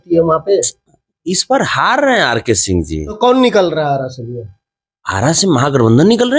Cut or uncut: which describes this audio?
cut